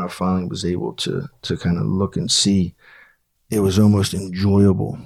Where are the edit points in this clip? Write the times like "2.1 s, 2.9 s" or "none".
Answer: none